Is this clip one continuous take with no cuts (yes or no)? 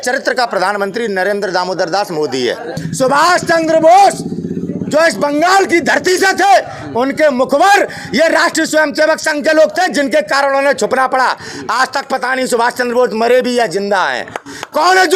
no